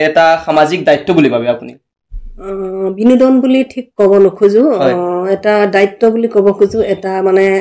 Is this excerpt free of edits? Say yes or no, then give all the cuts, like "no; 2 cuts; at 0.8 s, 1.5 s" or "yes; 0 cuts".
yes; 0 cuts